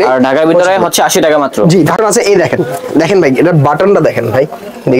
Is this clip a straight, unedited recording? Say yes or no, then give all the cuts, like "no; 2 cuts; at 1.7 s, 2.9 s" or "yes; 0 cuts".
no; 1 cut; at 2.0 s